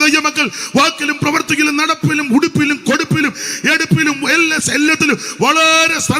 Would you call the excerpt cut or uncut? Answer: uncut